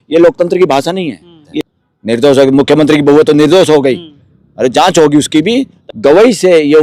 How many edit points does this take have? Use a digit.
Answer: 2